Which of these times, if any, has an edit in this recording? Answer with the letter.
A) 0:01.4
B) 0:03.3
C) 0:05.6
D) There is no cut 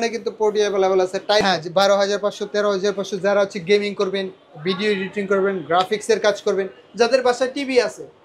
A